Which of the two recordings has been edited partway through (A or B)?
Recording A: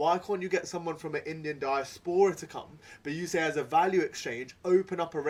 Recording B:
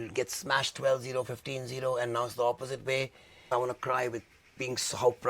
B